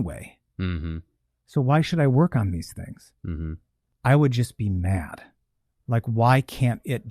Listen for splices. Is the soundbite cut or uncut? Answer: cut